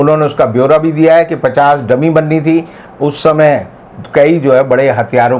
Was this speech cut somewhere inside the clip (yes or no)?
yes